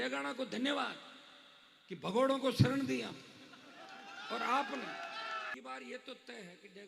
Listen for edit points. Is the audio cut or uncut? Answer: cut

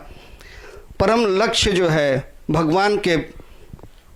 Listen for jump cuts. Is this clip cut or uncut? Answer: uncut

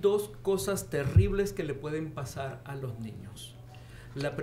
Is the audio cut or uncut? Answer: uncut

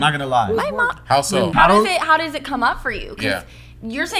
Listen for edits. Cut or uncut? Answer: cut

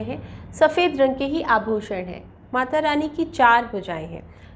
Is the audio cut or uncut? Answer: cut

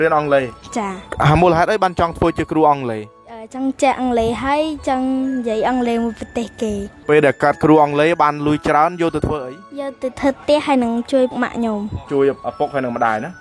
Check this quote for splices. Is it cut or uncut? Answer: uncut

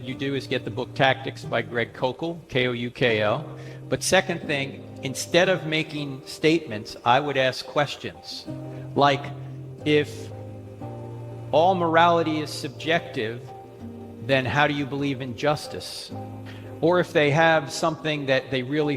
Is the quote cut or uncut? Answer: cut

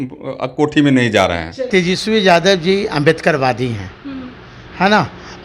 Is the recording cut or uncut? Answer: cut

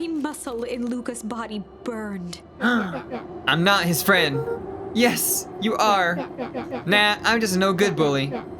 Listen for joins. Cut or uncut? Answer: uncut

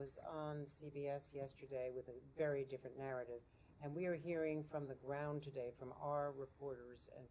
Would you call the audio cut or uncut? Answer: uncut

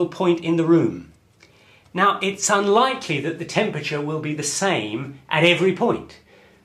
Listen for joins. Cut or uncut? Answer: uncut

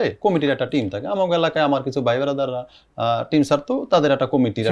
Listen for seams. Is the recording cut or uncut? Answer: uncut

